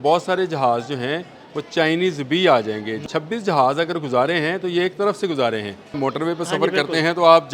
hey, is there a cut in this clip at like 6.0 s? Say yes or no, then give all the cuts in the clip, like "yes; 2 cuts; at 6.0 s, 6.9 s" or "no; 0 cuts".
yes; 2 cuts; at 3.0 s, 6.0 s